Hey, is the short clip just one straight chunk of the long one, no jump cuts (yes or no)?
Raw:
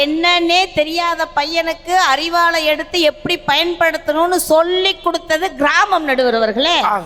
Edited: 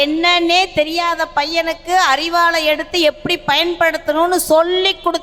yes